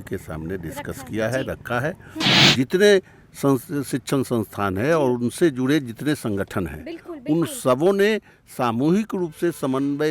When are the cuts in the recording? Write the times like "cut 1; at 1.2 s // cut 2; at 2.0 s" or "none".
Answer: cut 1; at 2.4 s